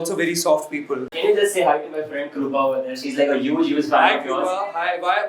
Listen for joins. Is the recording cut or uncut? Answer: cut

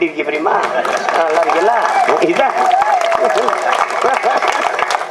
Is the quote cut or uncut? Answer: uncut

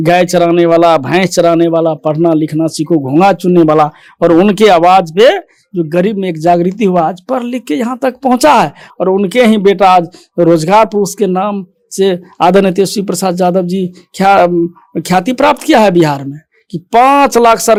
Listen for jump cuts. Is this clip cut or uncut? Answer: uncut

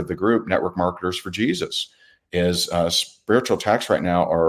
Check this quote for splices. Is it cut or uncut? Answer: uncut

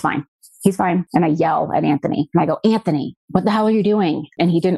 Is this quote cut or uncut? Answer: uncut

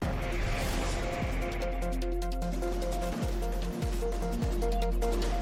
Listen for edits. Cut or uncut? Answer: uncut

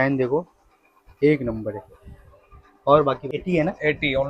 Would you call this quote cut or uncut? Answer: cut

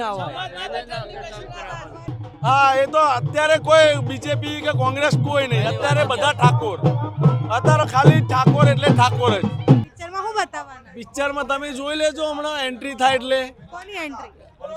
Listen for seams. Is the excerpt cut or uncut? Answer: cut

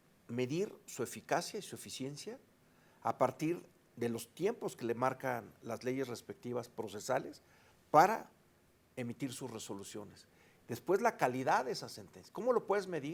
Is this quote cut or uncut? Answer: uncut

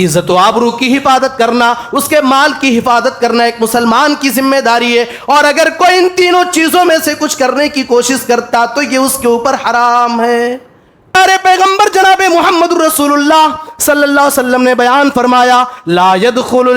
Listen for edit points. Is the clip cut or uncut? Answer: cut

